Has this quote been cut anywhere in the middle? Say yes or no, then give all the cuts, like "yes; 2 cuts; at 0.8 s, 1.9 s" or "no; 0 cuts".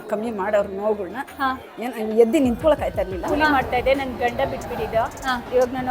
yes; 1 cut; at 3.3 s